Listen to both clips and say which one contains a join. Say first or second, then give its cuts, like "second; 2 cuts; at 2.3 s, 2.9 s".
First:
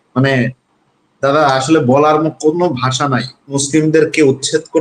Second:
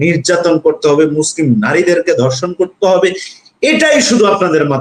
first; 1 cut; at 3.6 s